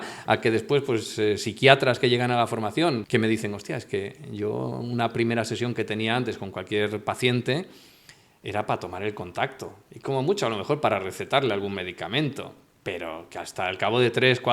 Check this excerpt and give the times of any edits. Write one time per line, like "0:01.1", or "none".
0:03.0